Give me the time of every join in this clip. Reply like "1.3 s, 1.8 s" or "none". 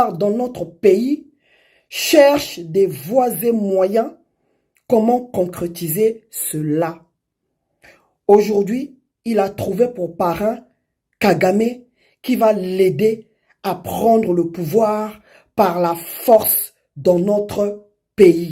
none